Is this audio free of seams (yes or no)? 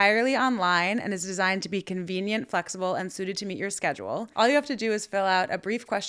yes